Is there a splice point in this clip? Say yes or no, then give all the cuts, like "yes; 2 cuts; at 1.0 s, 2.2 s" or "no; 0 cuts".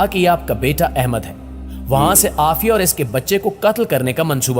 no; 0 cuts